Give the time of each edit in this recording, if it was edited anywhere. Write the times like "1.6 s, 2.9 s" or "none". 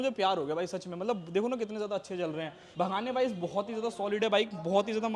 2.6 s